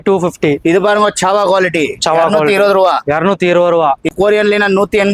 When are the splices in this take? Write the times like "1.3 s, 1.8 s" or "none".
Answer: 4.1 s

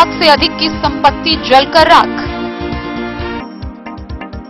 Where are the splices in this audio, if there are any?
none

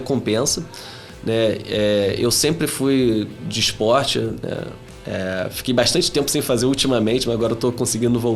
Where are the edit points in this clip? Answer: none

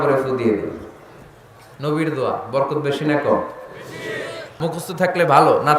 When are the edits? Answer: 4.5 s

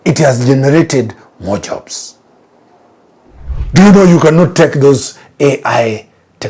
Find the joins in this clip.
3.5 s

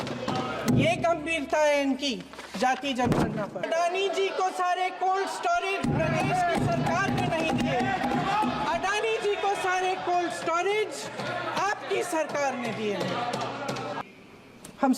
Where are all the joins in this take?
3.7 s, 14.0 s

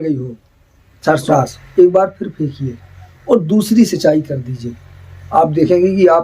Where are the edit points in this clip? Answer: 1.3 s

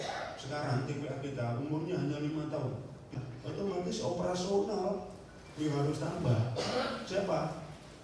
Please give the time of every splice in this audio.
3.2 s

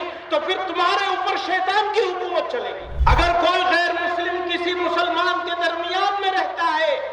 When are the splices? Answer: 2.8 s

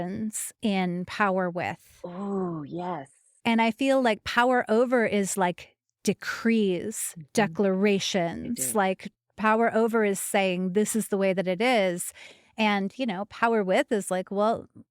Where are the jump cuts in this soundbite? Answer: 3.3 s

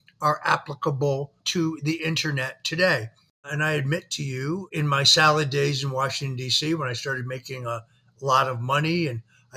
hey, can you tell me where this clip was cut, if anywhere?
1.4 s, 3.5 s, 4.7 s

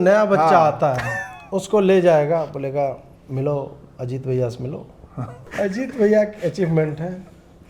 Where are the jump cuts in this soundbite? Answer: 5.5 s

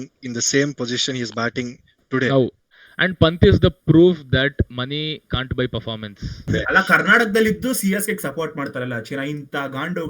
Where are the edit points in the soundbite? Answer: 2.6 s, 6.3 s

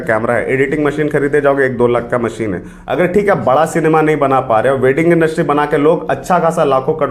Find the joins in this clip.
2.7 s

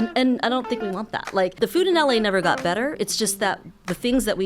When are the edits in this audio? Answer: 1.5 s

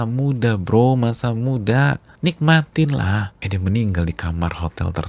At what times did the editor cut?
2.1 s, 3.4 s

